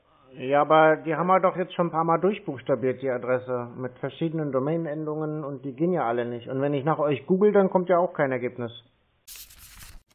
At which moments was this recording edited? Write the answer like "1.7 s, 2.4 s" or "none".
9.2 s